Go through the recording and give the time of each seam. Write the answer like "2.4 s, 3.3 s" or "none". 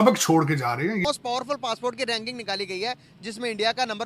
1.1 s